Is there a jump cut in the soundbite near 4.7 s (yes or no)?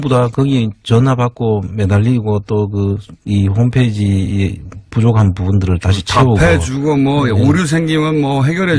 yes